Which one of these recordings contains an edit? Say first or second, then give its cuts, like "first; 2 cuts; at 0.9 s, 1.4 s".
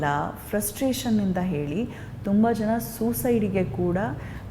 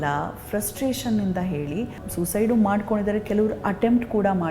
second; 1 cut; at 2.0 s